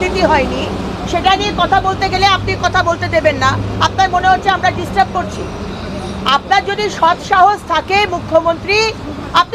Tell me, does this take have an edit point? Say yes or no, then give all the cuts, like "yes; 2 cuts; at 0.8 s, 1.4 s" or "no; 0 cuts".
no; 0 cuts